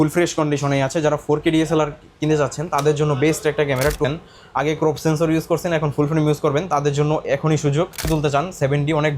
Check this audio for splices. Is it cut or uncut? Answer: cut